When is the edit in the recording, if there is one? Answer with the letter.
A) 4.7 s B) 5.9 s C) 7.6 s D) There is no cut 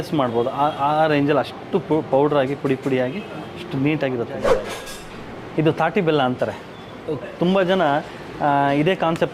A